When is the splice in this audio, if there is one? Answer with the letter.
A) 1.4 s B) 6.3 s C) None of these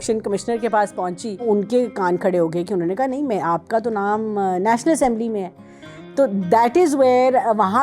A